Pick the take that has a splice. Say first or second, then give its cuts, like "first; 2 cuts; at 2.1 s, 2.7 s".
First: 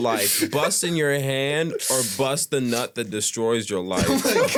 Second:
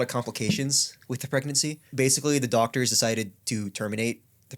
second; 1 cut; at 1.9 s